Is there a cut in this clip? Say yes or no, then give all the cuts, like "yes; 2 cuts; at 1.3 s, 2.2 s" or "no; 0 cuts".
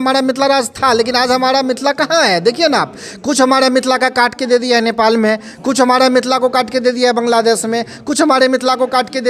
no; 0 cuts